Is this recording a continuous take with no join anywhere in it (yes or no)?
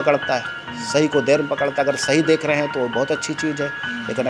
yes